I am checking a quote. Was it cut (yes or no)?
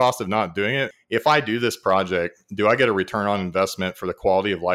yes